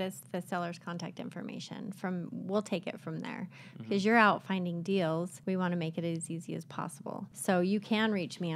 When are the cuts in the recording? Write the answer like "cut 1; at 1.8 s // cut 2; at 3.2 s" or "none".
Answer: cut 1; at 5.3 s // cut 2; at 7.3 s